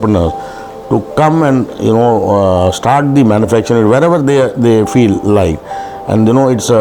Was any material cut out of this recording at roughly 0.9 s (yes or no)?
no